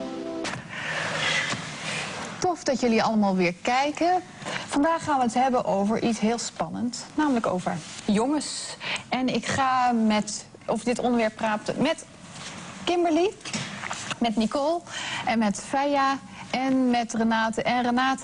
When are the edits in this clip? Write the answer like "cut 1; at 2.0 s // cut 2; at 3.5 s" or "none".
cut 1; at 1.2 s // cut 2; at 17.2 s